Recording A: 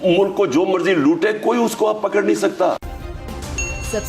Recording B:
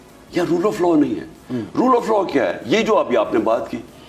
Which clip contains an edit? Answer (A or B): A